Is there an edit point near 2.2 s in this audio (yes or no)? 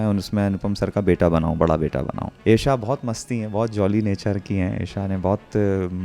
yes